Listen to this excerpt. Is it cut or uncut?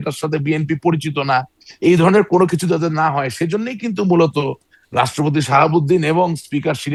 uncut